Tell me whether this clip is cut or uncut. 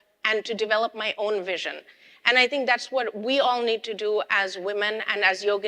uncut